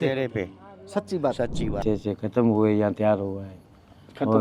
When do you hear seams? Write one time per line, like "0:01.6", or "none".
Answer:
0:01.8